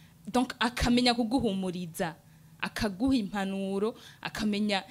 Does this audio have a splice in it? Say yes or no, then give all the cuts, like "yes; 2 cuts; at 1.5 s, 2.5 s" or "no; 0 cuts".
no; 0 cuts